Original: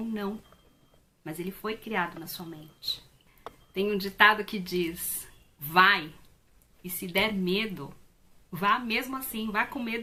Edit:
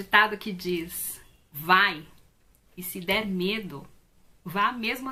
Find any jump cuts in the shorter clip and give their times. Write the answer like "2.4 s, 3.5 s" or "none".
none